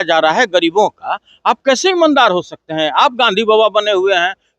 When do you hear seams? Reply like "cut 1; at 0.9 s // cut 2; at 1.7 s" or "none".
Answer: none